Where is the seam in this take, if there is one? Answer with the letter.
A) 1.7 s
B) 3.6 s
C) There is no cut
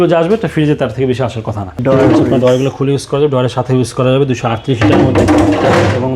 A